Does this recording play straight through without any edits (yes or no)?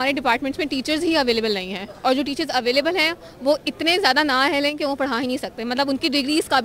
yes